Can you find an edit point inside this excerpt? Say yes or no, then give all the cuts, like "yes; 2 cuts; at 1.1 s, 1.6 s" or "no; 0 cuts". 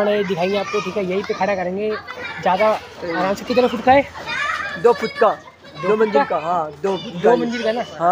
no; 0 cuts